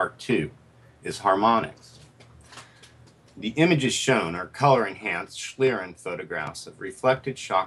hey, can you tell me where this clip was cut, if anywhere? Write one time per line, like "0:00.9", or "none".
0:03.3